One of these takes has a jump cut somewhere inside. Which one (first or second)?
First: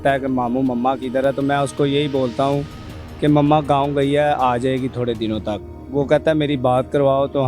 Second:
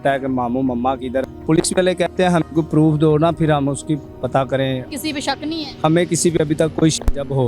second